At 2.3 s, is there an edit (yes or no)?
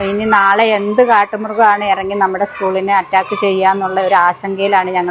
no